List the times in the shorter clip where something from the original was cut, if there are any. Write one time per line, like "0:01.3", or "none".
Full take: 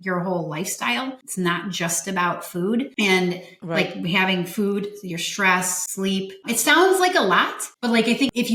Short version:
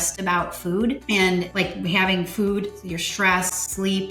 0:01.6

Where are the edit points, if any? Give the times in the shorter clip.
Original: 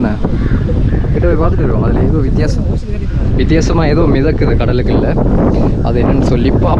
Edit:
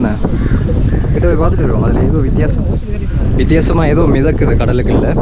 none

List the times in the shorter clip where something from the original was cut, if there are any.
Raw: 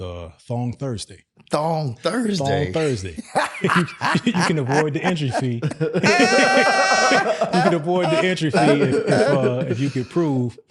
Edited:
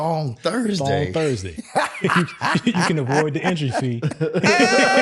none

